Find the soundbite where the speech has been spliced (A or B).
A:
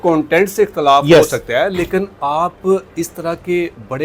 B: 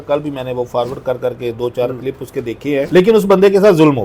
B